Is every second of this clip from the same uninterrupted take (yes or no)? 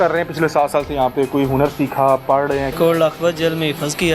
no